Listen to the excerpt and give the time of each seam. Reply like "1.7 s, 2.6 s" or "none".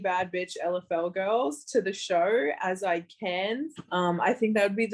3.8 s

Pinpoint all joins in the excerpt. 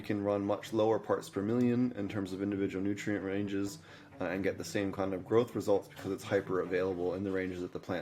none

